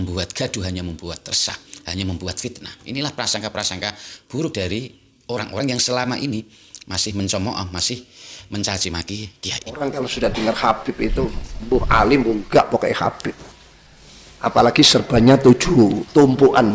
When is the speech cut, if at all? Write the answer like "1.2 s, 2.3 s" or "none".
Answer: 10.1 s